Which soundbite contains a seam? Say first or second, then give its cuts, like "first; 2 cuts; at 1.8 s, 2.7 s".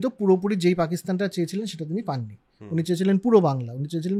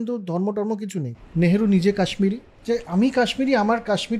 second; 2 cuts; at 1.1 s, 2.5 s